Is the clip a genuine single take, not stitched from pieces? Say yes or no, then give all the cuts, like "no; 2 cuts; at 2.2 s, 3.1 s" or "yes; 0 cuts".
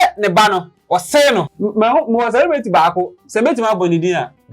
no; 1 cut; at 1.5 s